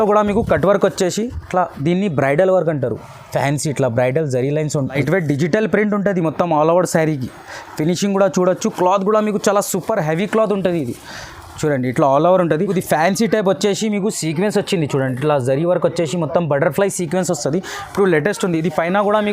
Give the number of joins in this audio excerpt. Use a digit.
2